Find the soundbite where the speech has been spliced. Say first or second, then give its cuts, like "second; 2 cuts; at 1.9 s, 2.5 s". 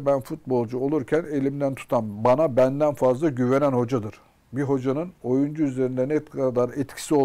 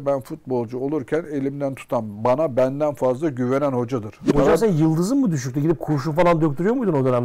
second; 1 cut; at 4.3 s